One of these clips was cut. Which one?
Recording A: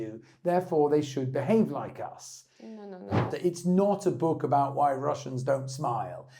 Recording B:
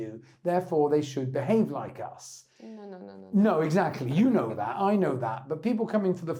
A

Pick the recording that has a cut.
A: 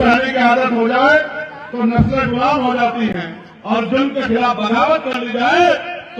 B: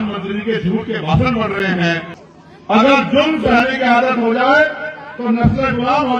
B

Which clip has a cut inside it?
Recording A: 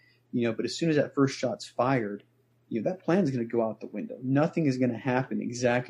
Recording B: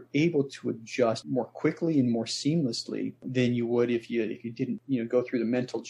B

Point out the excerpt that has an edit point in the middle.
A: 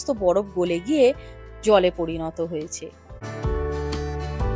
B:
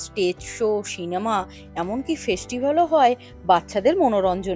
A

